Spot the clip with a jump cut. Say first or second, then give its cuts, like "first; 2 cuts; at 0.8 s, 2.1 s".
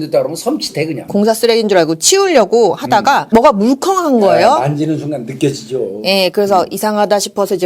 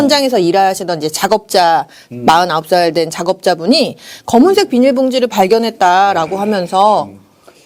first; 2 cuts; at 1.0 s, 3.2 s